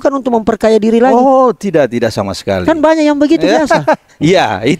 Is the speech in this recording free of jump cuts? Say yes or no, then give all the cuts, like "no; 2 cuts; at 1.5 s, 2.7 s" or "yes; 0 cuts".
yes; 0 cuts